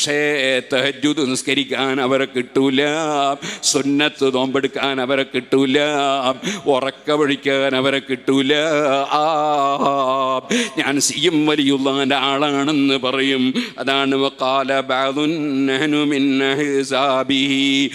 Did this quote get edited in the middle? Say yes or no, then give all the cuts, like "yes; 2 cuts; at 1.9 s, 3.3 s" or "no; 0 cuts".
no; 0 cuts